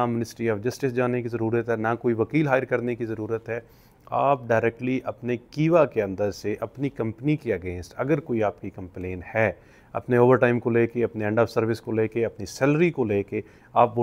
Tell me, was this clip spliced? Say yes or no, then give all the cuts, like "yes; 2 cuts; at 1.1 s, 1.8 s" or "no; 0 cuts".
no; 0 cuts